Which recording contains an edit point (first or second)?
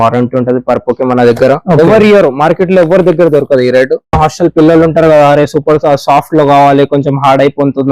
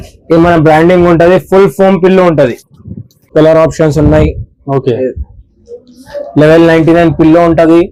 first